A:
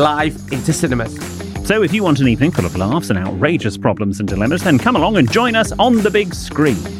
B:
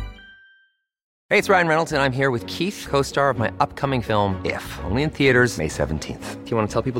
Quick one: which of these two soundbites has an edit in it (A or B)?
B